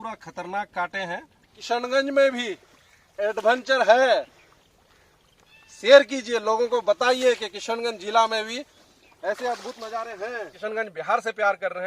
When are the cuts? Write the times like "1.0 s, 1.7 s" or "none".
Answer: 1.6 s, 10.5 s